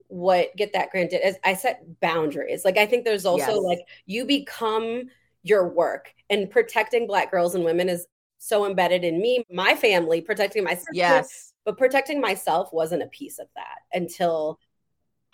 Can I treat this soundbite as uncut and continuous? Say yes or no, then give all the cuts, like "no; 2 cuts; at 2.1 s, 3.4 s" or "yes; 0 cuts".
no; 1 cut; at 9.5 s